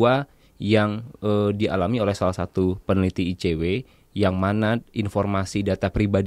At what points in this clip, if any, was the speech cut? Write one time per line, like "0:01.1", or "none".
none